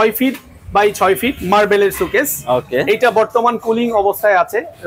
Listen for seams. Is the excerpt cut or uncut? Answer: uncut